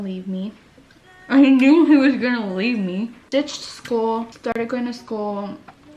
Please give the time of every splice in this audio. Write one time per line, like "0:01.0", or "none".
0:03.2
0:04.3